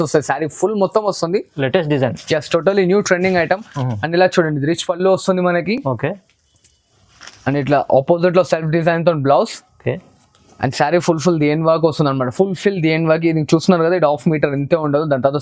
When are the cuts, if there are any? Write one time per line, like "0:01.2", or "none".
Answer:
none

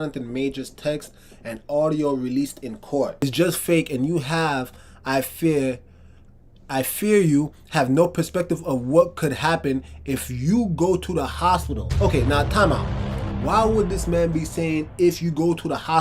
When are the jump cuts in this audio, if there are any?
0:03.2

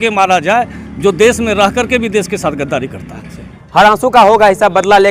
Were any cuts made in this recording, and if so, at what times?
none

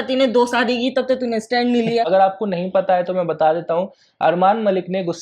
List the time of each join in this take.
0:02.1

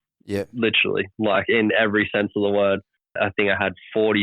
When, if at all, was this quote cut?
0:03.2

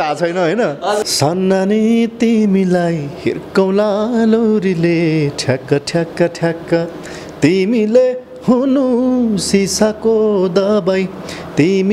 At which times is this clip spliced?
0:01.0

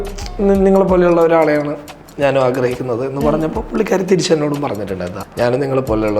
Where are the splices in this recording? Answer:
0:05.1

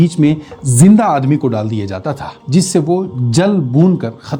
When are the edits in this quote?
none

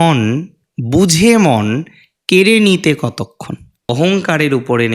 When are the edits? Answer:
0:03.9

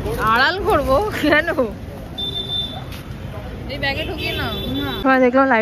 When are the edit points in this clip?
none

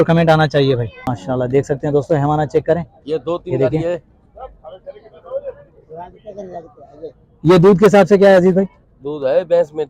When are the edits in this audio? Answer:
0:01.1

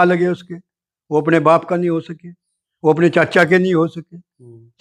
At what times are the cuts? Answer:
none

